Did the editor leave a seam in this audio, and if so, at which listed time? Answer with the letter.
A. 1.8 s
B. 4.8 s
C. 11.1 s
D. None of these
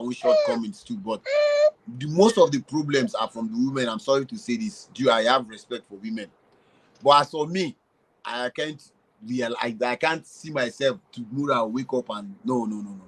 D